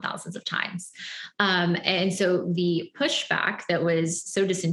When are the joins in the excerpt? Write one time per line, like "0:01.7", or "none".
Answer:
none